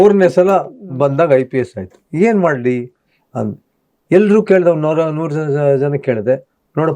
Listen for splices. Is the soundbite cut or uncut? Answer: uncut